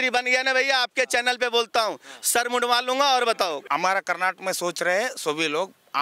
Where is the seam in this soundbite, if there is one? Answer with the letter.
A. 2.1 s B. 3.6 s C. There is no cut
B